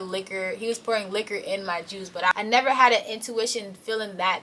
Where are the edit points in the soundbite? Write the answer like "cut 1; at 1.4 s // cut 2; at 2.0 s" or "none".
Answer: cut 1; at 2.3 s